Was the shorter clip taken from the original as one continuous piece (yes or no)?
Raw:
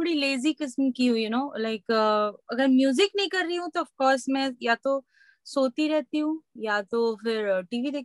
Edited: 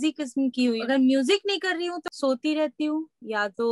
no